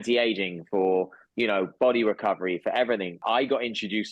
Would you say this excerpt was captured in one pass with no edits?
no; 1 cut; at 3.2 s

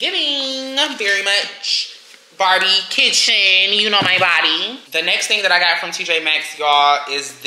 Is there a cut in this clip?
no; 0 cuts

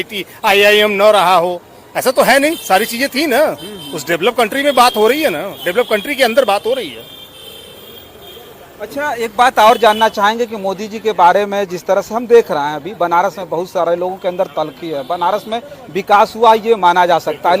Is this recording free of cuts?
yes; 0 cuts

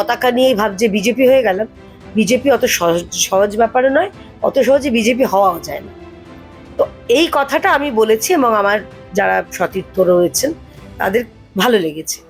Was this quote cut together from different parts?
no; 0 cuts

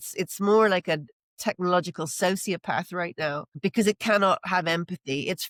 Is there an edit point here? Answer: no; 0 cuts

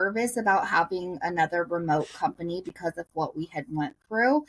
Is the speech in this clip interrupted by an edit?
no; 0 cuts

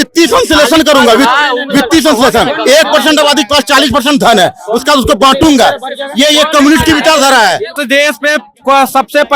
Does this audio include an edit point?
yes; 1 cut; at 7.7 s

